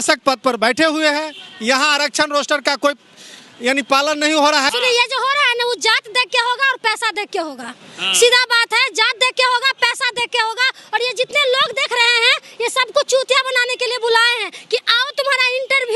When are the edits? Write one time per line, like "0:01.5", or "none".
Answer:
0:04.7